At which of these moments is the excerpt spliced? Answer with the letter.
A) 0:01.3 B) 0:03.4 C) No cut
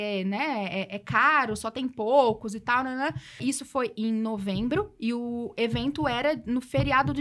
B